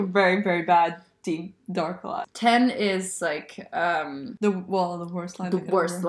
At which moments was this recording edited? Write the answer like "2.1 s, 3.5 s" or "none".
2.1 s